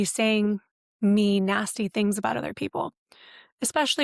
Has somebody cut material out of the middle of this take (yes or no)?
no